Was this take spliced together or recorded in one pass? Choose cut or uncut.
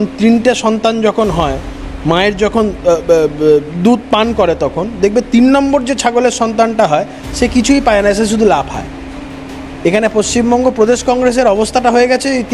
uncut